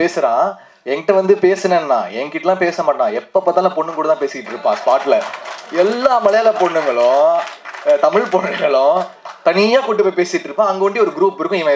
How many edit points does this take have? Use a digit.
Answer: 0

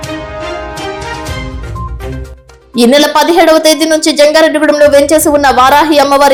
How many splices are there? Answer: 0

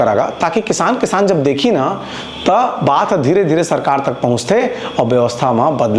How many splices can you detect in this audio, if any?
0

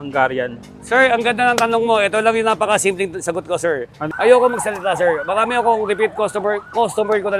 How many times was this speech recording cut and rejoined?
1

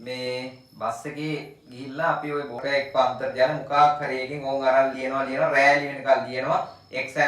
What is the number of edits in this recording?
1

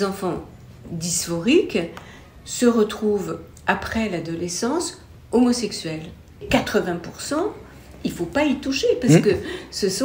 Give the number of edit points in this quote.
1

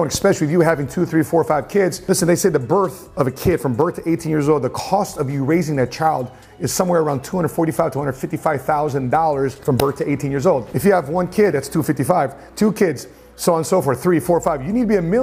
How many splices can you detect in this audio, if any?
0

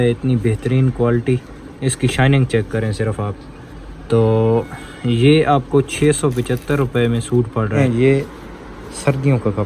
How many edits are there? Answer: 1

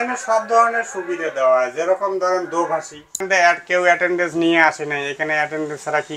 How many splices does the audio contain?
1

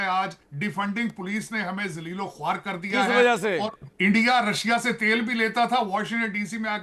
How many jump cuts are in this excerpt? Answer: 1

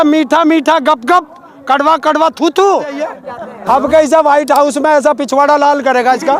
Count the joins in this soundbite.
1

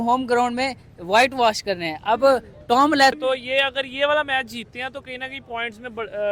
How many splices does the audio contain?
1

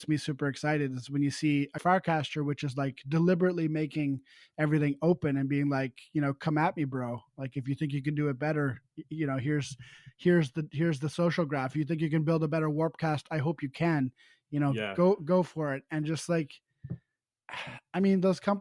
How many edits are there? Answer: 1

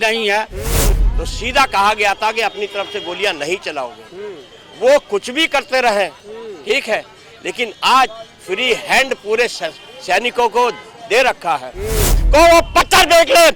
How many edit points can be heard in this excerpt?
2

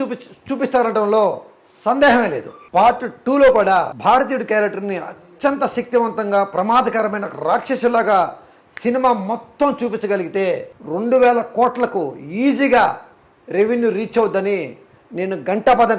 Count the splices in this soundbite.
2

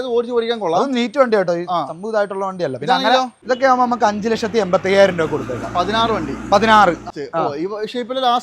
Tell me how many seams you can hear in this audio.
2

